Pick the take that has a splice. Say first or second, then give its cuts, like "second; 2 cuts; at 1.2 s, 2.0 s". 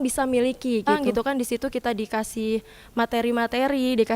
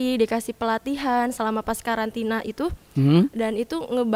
first; 1 cut; at 0.9 s